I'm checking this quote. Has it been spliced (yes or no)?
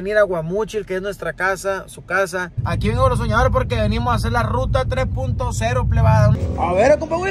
yes